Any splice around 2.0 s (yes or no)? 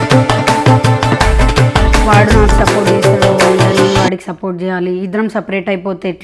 no